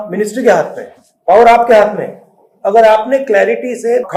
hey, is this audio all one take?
yes; 0 cuts

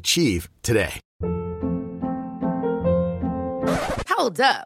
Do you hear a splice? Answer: yes; 1 cut; at 1.0 s

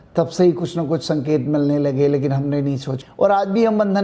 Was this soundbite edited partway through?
yes; 1 cut; at 2.9 s

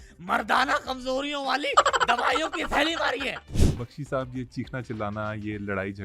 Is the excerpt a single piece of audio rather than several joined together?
no; 1 cut; at 3.5 s

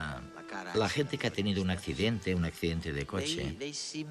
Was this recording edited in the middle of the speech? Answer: yes; 1 cut; at 2.7 s

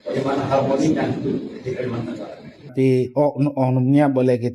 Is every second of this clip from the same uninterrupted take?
no; 1 cut; at 2.7 s

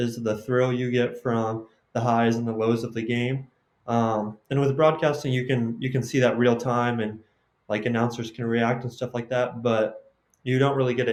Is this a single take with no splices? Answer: yes; 0 cuts

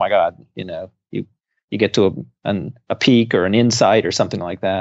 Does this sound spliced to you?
no; 0 cuts

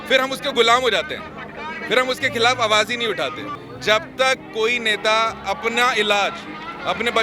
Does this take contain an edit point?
yes; 1 cut; at 3.6 s

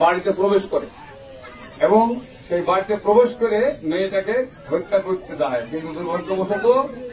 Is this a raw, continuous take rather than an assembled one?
yes; 0 cuts

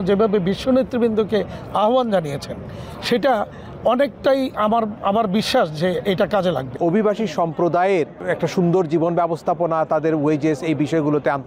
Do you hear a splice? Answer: yes; 2 cuts; at 6.8 s, 8.2 s

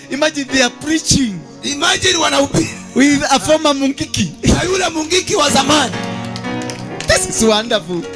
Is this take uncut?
yes; 0 cuts

